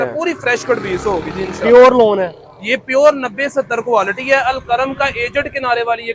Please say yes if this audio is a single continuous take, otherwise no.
yes